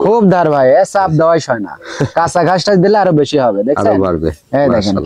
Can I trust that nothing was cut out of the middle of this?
yes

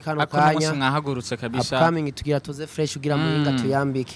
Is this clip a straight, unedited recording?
yes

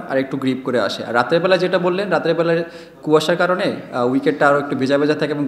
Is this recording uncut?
yes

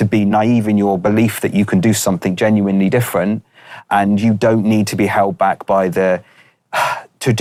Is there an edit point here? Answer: no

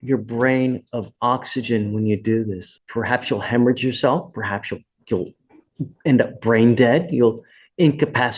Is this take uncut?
no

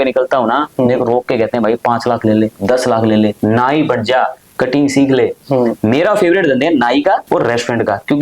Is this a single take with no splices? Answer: no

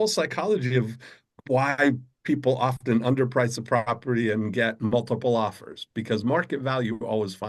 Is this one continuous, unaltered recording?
yes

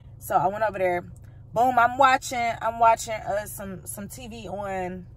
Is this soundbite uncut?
yes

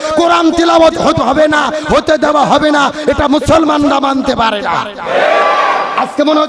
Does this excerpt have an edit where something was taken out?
no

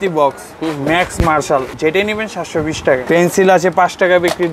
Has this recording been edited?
yes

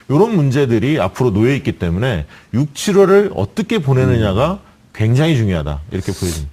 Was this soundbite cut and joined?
no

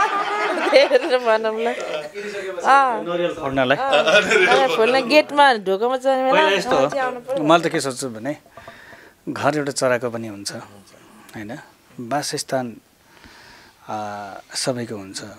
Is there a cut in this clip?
no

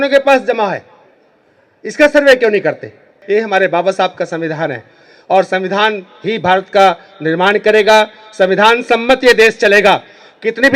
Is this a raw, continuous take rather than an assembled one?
no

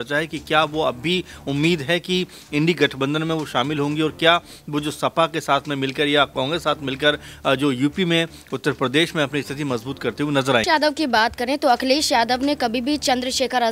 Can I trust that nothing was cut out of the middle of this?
no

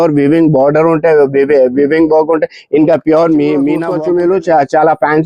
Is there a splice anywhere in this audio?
yes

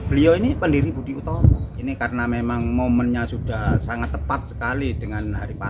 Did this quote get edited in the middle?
yes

